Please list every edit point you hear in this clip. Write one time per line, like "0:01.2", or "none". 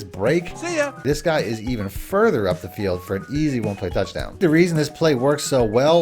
0:01.0
0:04.4

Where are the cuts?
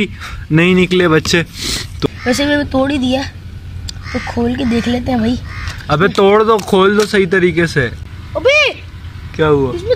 0:02.1
0:08.0

